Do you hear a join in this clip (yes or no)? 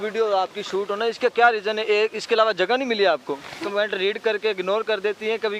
yes